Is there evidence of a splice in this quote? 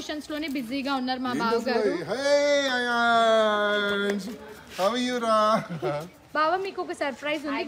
no; 0 cuts

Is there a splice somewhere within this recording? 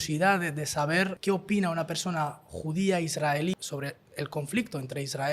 yes; 2 cuts; at 1.2 s, 3.6 s

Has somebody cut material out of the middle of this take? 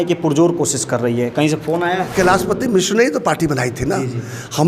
yes; 1 cut; at 2.1 s

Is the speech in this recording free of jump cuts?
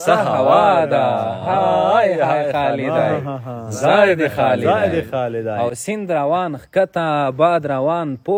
yes; 0 cuts

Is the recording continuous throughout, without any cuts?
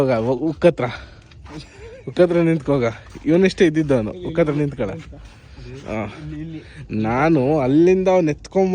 yes; 0 cuts

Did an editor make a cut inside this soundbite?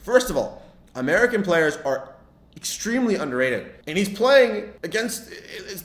yes; 2 cuts; at 3.8 s, 4.7 s

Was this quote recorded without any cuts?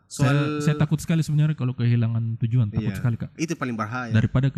yes; 0 cuts

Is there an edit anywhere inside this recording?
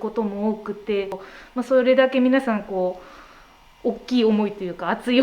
yes; 1 cut; at 1.3 s

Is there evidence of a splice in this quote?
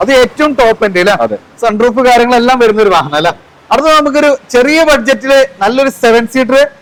no; 0 cuts

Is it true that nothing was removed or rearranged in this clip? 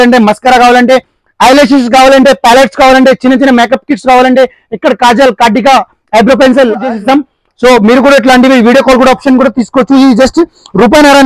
no; 1 cut; at 6.9 s

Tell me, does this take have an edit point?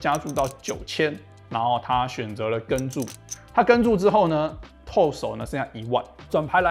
no; 0 cuts

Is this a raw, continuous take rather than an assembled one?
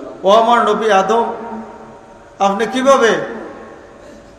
yes; 0 cuts

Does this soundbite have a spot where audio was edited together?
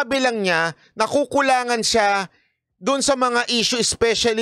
no; 0 cuts

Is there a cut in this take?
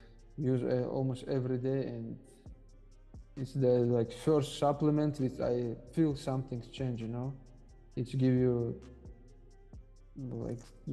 no; 0 cuts

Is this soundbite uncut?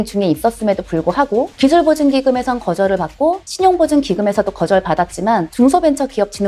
yes; 0 cuts

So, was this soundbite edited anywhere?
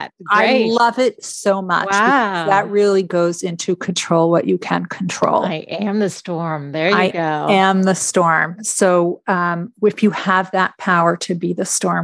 no; 0 cuts

